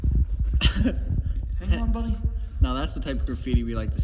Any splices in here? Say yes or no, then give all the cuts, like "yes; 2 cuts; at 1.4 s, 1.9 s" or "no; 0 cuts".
no; 0 cuts